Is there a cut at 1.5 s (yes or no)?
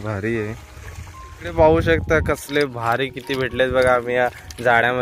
yes